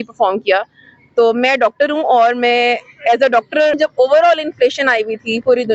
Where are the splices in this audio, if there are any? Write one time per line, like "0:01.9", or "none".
0:03.8